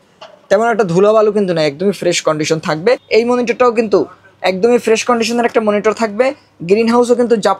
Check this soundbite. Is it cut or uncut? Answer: cut